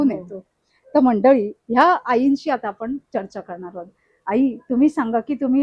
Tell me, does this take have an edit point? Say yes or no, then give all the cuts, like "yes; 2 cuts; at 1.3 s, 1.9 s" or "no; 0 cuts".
no; 0 cuts